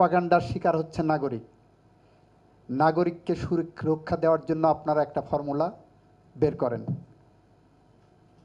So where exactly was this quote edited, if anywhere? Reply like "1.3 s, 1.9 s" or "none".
none